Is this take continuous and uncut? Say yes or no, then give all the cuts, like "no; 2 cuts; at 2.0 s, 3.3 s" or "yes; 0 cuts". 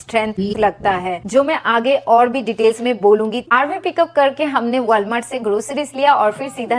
no; 1 cut; at 3.4 s